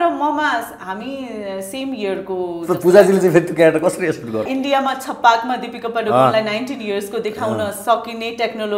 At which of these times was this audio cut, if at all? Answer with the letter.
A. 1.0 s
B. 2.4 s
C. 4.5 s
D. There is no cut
C